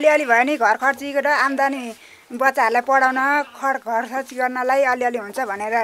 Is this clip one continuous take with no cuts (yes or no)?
yes